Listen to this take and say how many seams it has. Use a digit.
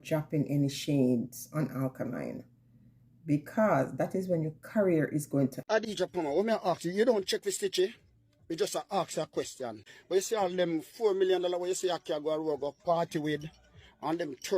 2